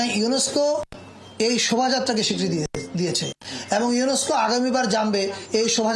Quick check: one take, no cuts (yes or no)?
yes